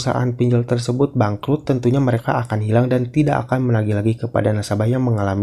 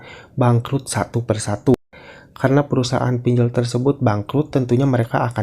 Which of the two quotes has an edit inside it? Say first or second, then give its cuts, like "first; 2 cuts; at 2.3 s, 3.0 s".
second; 1 cut; at 1.8 s